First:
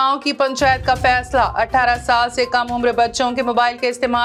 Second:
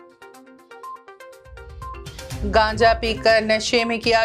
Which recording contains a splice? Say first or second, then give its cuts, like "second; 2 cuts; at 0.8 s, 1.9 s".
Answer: second; 1 cut; at 1.9 s